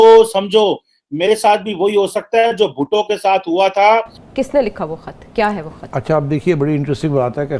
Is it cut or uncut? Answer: cut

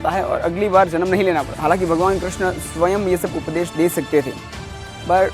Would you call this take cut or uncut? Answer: cut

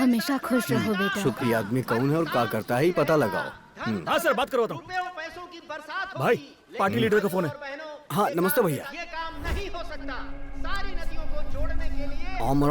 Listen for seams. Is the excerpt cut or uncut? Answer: cut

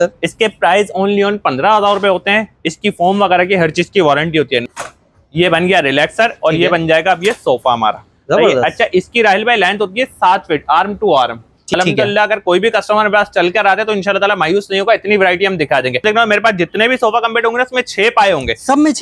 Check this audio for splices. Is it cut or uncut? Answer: cut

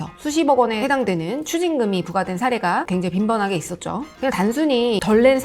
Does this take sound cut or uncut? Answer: cut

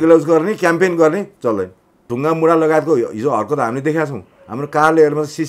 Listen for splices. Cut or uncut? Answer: cut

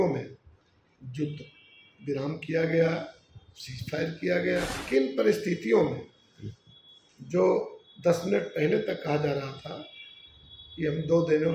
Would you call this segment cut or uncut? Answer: cut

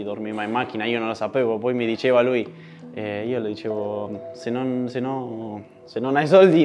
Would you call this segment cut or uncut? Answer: uncut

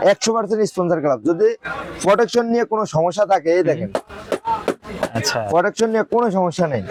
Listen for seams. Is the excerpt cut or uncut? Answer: uncut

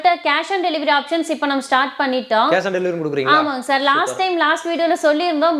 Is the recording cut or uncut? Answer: uncut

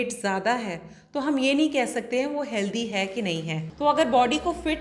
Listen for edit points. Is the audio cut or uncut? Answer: cut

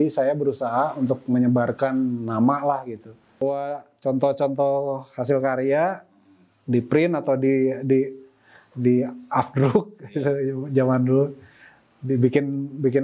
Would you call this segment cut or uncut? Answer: cut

